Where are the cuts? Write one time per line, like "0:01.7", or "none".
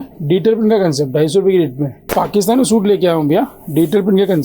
0:01.9